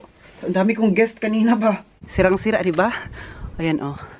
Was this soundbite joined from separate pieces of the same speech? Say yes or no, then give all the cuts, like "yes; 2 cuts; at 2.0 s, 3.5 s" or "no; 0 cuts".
yes; 1 cut; at 2.0 s